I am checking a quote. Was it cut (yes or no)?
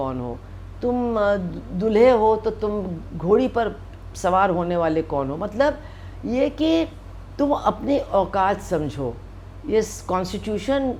no